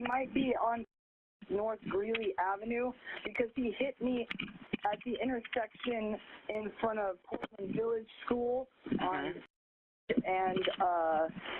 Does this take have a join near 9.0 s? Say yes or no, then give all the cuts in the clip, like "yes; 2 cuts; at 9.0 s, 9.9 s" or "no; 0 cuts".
yes; 1 cut; at 9.0 s